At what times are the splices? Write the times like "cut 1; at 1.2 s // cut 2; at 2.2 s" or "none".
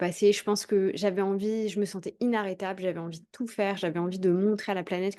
none